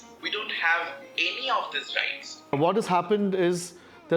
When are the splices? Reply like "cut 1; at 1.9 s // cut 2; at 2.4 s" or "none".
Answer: cut 1; at 2.4 s